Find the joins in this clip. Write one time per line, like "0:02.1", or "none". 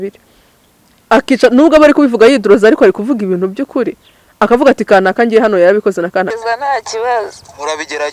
0:06.3